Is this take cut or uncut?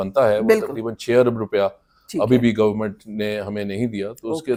uncut